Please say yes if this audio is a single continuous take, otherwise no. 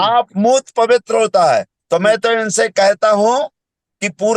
yes